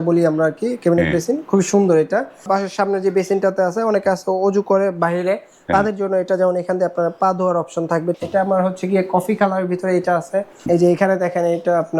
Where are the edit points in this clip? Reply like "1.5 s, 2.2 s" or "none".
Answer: 2.5 s, 8.2 s, 10.6 s